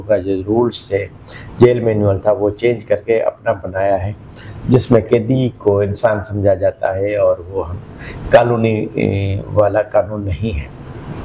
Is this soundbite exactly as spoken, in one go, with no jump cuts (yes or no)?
yes